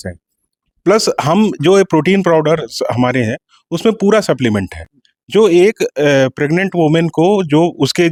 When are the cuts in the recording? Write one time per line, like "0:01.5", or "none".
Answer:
none